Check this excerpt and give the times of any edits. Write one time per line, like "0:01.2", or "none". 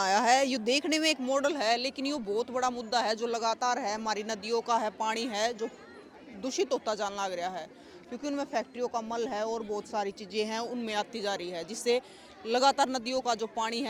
none